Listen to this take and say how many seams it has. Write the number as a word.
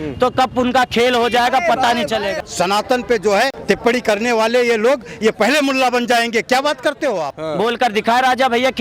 three